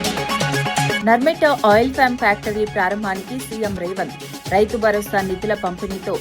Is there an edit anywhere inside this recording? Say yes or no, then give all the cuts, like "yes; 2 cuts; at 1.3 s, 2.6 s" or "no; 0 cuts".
yes; 1 cut; at 1.0 s